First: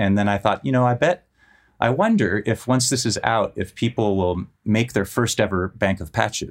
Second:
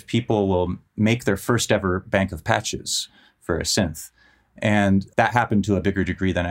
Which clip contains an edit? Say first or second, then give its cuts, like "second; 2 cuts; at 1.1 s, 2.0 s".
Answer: second; 1 cut; at 5.1 s